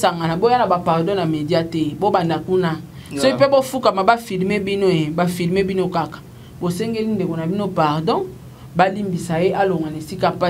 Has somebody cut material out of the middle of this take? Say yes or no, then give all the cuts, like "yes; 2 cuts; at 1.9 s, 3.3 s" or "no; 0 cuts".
no; 0 cuts